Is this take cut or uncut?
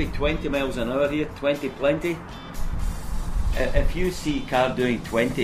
uncut